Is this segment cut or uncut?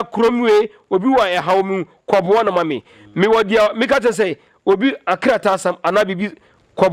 uncut